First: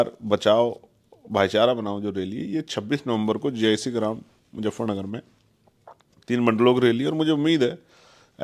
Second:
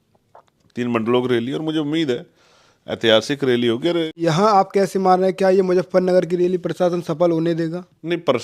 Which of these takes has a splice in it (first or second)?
second